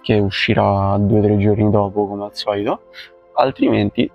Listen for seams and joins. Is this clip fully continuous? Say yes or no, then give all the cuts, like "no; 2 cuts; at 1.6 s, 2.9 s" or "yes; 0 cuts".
yes; 0 cuts